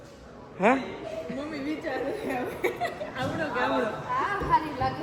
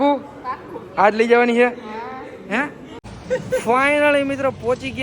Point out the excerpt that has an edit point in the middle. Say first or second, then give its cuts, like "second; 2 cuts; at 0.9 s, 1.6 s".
second; 1 cut; at 3.0 s